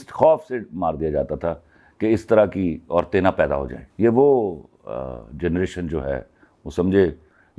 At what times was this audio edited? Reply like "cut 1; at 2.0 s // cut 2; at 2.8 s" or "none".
cut 1; at 3.8 s

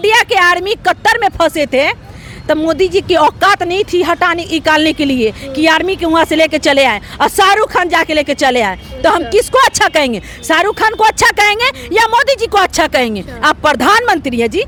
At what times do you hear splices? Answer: none

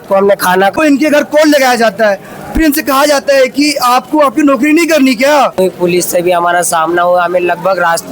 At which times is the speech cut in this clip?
cut 1; at 0.8 s // cut 2; at 5.6 s

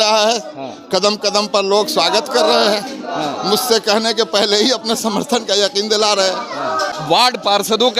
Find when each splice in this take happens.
cut 1; at 6.8 s

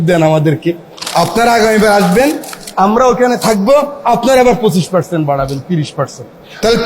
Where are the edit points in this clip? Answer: none

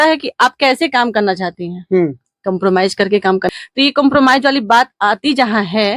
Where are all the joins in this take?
cut 1; at 3.5 s

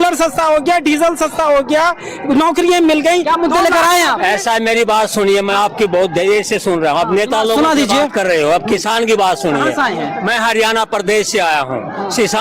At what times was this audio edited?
none

